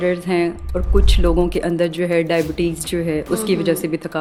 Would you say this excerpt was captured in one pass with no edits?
yes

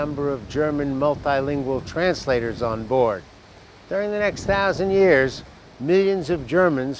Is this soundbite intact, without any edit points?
no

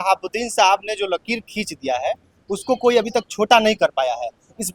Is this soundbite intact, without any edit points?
yes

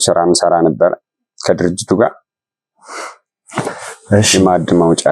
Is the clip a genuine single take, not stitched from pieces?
yes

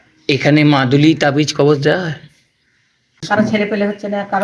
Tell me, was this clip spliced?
yes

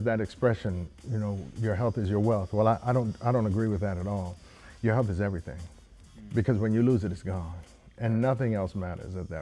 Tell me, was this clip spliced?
no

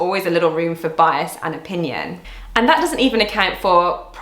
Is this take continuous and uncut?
yes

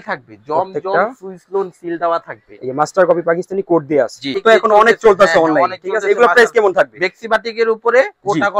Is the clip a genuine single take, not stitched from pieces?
no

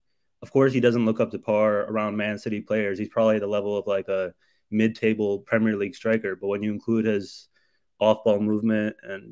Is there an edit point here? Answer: no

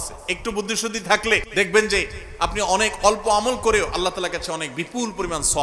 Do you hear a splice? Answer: yes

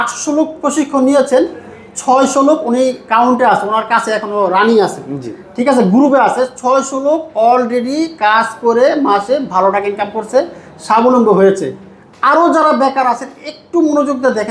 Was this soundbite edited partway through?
no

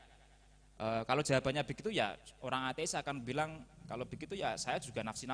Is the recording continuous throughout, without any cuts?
yes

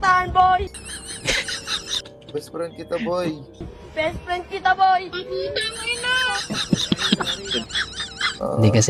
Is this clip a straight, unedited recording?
yes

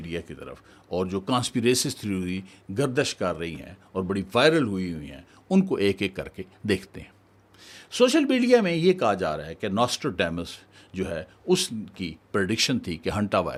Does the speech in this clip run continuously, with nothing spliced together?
yes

